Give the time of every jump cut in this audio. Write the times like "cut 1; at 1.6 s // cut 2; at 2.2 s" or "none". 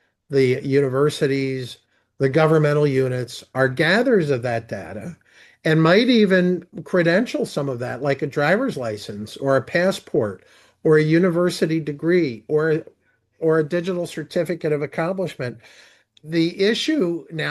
cut 1; at 16.2 s

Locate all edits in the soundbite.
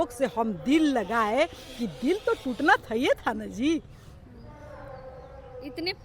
none

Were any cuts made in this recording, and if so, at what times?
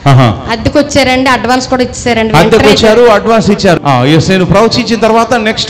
cut 1; at 3.8 s

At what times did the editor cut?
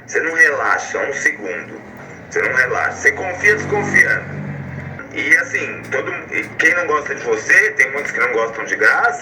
cut 1; at 2.0 s // cut 2; at 5.0 s

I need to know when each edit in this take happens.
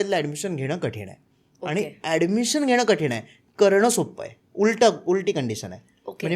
none

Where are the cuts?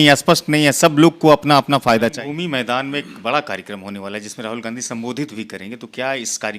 cut 1; at 2.2 s

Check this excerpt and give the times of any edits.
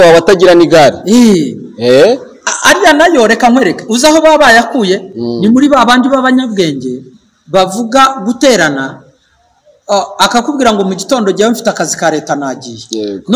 none

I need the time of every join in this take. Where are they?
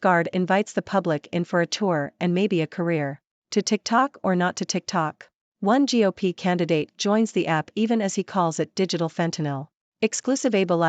cut 1; at 3.3 s // cut 2; at 9.8 s

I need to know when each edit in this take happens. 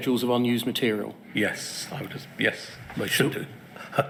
none

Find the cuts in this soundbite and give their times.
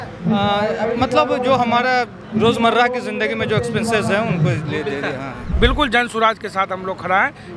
cut 1; at 5.4 s

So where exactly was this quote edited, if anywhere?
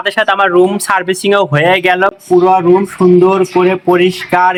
none

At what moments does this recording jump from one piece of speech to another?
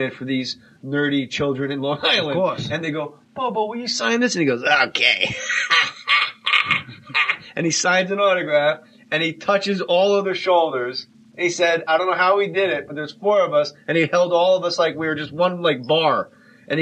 cut 1; at 4.5 s

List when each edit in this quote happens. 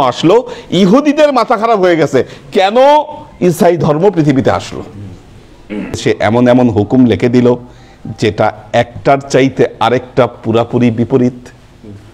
cut 1; at 6.0 s

